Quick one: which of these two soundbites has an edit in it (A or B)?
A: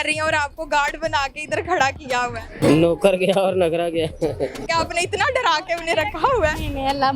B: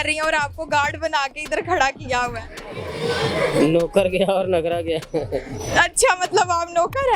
A